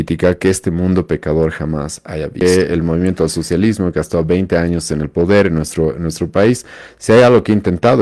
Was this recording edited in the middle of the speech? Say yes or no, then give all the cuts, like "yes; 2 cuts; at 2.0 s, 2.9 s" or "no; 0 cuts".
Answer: yes; 1 cut; at 2.4 s